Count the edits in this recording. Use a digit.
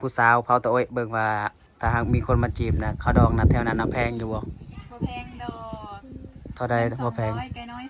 1